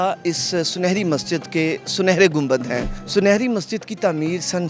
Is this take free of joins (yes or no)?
no